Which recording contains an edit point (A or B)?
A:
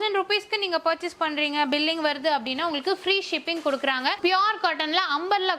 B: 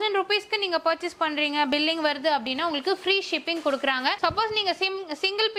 A